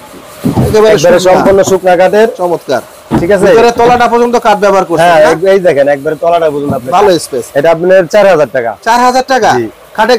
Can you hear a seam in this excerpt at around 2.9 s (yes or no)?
no